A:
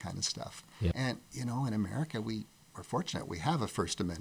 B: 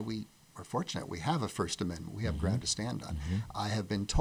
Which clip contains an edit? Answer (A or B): A